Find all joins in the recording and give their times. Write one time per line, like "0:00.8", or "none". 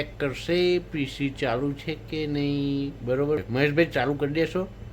0:03.5